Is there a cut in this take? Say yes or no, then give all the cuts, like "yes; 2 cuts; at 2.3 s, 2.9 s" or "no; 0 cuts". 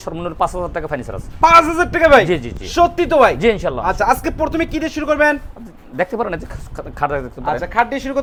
no; 0 cuts